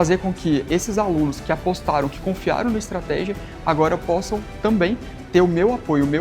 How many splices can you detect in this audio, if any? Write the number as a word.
one